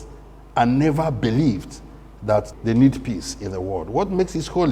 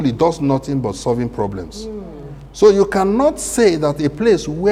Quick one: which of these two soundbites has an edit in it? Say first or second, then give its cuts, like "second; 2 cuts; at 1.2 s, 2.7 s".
first; 1 cut; at 2.5 s